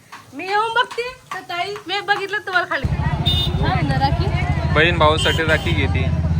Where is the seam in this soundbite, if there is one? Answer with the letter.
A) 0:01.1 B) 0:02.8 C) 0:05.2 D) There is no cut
B